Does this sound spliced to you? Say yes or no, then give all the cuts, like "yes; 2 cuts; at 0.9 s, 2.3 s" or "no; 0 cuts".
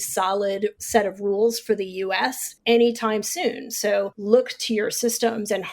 yes; 3 cuts; at 0.8 s, 2.5 s, 4.2 s